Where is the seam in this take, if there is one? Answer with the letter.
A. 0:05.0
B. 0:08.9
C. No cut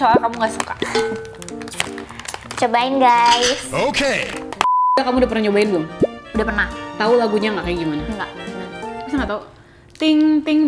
A